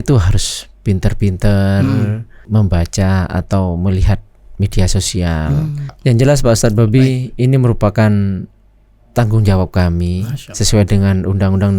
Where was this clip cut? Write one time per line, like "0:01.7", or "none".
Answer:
0:02.4
0:05.9